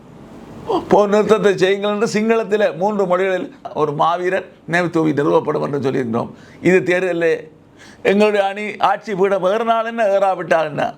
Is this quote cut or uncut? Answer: cut